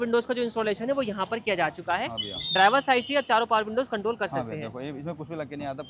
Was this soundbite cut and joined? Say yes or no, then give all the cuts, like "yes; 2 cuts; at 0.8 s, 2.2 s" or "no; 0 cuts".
no; 0 cuts